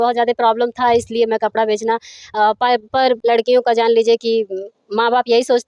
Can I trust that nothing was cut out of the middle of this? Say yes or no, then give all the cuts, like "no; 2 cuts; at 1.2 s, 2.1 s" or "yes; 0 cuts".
no; 1 cut; at 3.2 s